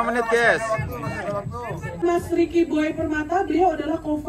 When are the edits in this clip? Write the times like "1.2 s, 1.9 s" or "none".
2.0 s